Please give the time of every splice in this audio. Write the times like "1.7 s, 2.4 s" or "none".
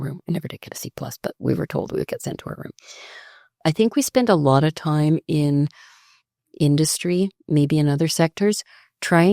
3.6 s